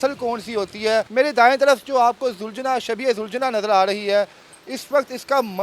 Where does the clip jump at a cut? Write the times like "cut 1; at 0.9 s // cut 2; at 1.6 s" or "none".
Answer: cut 1; at 1.1 s